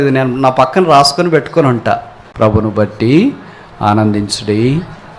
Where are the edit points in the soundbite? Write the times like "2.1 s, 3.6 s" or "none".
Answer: 2.2 s

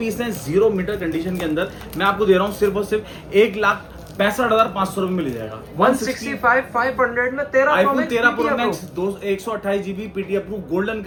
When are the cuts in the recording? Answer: none

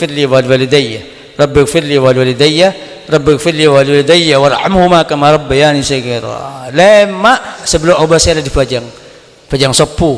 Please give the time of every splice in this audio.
7.6 s

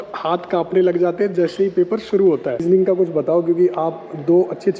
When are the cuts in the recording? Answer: 2.6 s

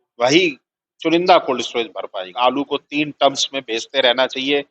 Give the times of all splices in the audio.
2.2 s

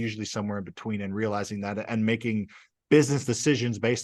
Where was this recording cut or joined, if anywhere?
none

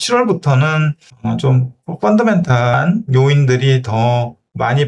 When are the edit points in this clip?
1.1 s, 2.7 s

